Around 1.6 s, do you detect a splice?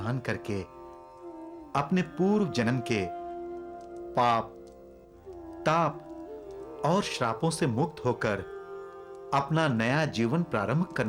no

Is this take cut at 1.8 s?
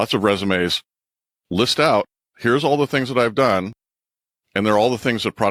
no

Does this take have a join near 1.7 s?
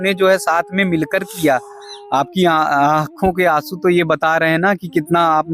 no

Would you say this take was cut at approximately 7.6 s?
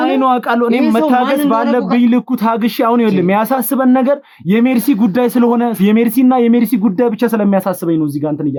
no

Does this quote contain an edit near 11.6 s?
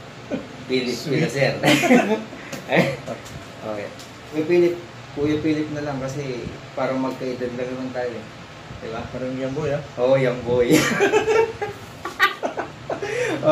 no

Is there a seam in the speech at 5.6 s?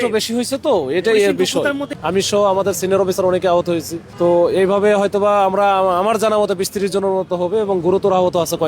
no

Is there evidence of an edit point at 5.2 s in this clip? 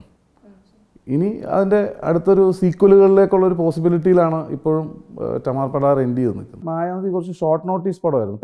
no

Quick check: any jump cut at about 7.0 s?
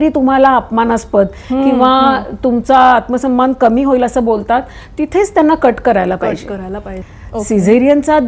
yes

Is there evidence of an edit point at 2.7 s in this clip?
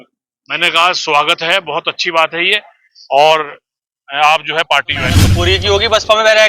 no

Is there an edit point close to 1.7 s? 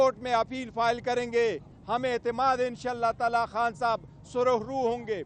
no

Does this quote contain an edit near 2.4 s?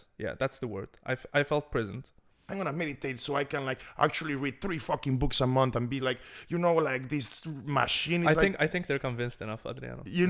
yes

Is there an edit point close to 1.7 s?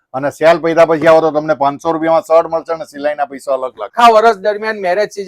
no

